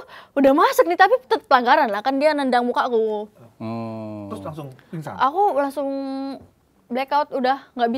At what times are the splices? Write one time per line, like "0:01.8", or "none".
none